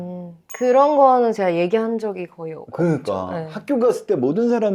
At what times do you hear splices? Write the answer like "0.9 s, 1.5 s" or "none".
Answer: none